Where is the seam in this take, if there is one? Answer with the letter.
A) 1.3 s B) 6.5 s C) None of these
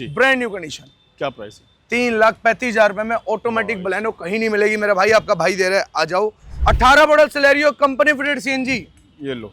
B